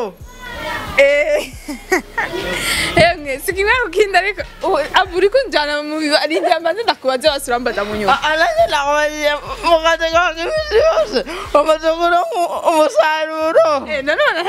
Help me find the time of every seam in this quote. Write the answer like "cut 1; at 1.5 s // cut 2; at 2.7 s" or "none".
none